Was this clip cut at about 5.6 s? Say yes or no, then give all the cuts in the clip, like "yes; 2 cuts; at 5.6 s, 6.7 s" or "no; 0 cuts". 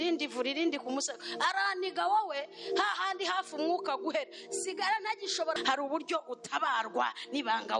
yes; 1 cut; at 5.6 s